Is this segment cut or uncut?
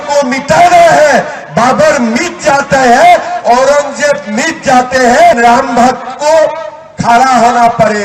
cut